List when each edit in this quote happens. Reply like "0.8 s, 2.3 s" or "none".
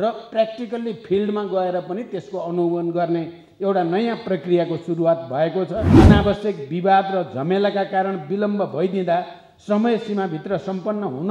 5.9 s